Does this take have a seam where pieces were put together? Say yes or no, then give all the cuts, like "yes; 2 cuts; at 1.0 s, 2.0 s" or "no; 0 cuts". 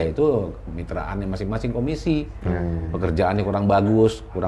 no; 0 cuts